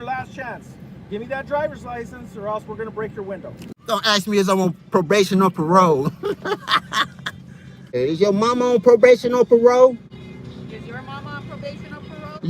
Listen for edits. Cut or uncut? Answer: cut